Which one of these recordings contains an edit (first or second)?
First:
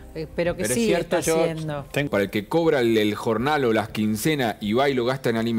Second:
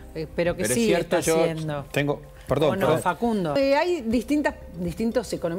first